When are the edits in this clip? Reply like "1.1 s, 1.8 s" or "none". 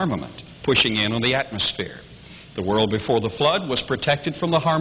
2.5 s